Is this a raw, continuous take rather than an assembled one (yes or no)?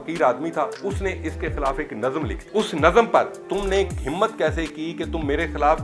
no